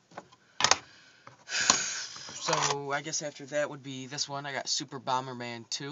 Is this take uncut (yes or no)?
no